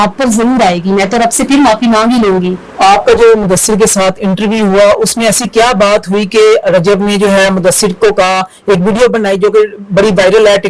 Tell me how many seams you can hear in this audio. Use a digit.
0